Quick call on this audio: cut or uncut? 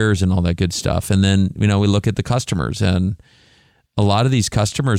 uncut